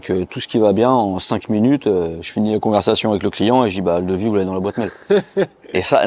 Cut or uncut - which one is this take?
uncut